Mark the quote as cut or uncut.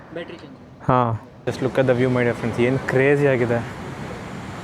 cut